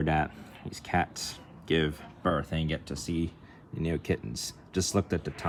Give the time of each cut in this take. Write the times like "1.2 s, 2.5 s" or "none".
none